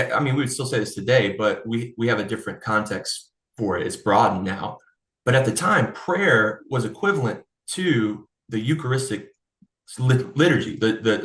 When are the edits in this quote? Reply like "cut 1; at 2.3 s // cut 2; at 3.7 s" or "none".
none